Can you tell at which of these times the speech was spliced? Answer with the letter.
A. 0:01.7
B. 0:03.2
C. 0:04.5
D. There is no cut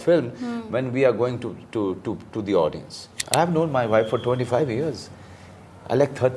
B